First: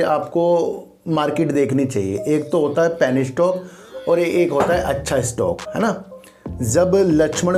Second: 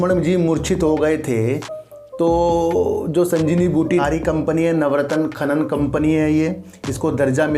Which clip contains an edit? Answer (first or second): second